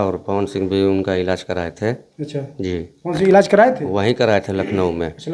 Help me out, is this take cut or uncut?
uncut